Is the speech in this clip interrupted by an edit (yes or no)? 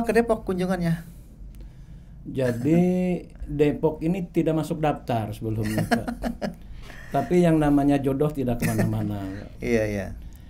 no